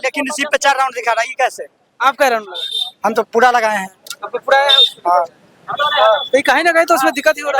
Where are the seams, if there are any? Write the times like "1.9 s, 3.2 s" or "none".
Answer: none